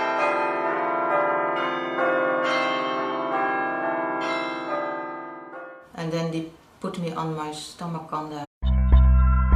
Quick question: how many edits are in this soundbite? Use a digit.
0